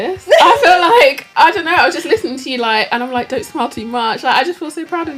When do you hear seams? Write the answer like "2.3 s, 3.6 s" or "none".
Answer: none